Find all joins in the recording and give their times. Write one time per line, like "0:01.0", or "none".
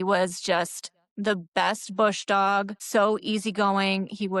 0:02.8